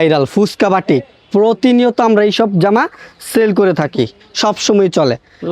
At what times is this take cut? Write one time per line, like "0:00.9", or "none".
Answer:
none